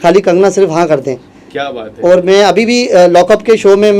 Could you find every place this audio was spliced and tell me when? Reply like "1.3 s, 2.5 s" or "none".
none

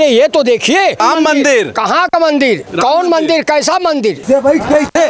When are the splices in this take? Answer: 1.0 s, 2.7 s, 4.2 s

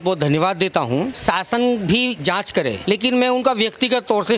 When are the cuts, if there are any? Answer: 1.2 s, 2.8 s

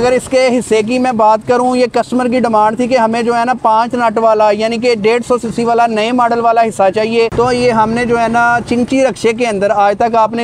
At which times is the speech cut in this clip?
none

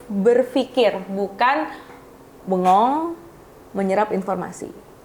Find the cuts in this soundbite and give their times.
none

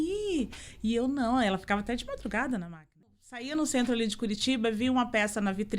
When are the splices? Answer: 3.2 s

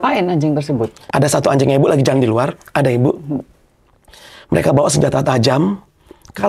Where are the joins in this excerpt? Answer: 1.0 s

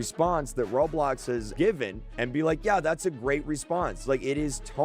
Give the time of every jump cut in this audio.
1.5 s

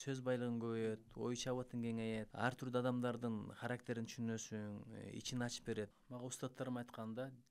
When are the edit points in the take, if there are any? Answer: 2.3 s, 6.0 s

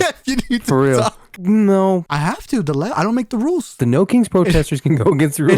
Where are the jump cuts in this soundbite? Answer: 1.2 s, 2.1 s, 3.8 s

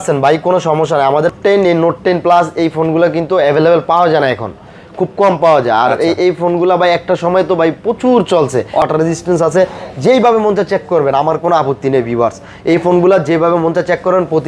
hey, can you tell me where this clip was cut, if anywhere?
1.3 s, 8.8 s

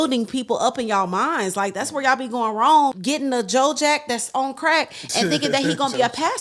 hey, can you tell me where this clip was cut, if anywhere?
3.0 s

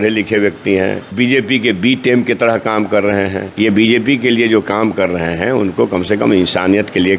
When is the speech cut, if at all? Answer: 1.0 s, 3.4 s

